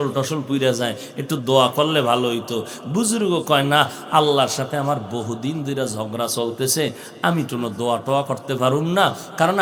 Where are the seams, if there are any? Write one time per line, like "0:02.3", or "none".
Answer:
none